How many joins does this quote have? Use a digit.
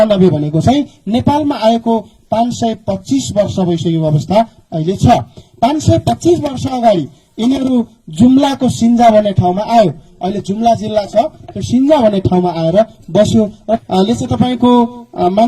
1